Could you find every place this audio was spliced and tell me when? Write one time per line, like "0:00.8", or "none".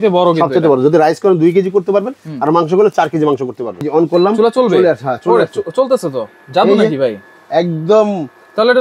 0:03.8